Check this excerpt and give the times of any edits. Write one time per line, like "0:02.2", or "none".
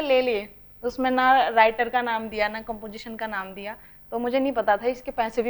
none